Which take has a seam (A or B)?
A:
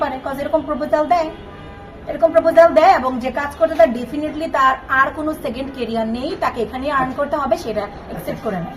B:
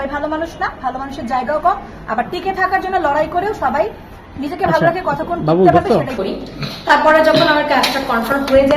B